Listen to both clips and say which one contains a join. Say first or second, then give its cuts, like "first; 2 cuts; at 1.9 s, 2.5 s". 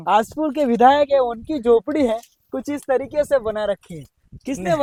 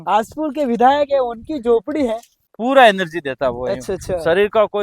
second; 1 cut; at 2.4 s